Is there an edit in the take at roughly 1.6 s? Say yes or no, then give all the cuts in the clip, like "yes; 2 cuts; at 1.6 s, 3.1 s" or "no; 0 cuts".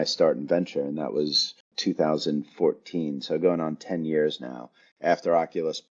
yes; 1 cut; at 1.6 s